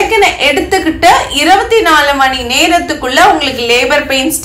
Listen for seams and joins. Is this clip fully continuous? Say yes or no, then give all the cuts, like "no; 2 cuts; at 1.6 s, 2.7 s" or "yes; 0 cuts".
yes; 0 cuts